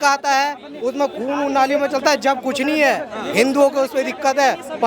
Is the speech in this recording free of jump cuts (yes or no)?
yes